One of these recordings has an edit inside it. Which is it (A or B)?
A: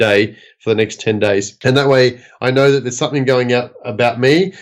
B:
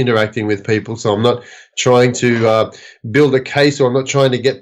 A